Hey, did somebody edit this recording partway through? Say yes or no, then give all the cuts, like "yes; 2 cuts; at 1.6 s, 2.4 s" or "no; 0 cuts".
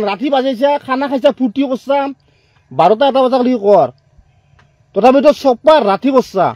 no; 0 cuts